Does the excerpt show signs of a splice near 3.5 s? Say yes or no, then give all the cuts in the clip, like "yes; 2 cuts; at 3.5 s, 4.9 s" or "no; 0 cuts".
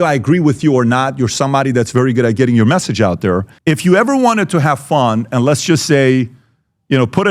yes; 1 cut; at 3.5 s